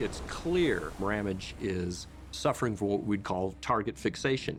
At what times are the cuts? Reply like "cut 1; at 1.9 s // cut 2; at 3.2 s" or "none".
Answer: none